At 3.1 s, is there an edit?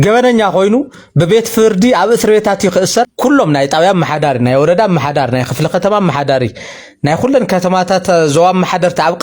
yes; 1 cut; at 3.1 s

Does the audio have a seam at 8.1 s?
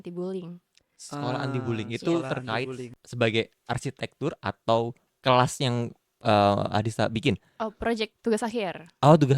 no; 1 cut; at 2.9 s

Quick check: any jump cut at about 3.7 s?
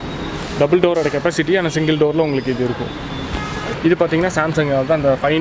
yes; 1 cut; at 3.7 s

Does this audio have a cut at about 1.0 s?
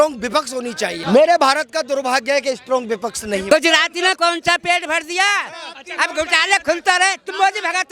yes; 2 cuts; at 1.0 s, 3.5 s

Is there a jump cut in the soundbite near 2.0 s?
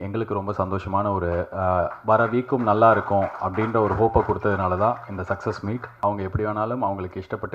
no; 1 cut; at 5.9 s

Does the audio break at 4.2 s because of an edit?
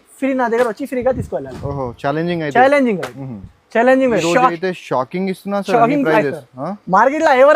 yes; 1 cut; at 4.2 s

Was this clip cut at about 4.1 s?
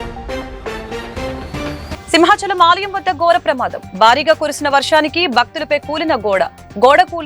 no; 1 cut; at 1.9 s

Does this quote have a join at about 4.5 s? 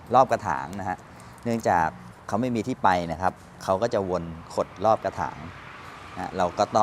no; 1 cut; at 2.1 s

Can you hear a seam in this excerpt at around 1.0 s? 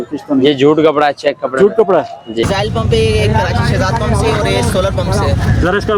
no; 1 cut; at 2.4 s

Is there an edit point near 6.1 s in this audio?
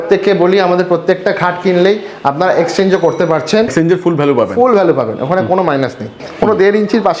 yes; 2 cuts; at 3.7 s, 6.1 s

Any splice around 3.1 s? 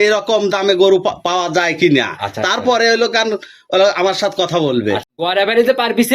no; 1 cut; at 5.1 s

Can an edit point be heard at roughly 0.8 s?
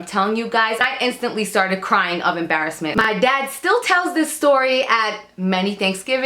yes; 2 cuts; at 0.8 s, 2.9 s

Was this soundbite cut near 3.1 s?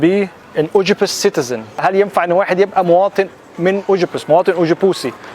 no; 1 cut; at 1.8 s

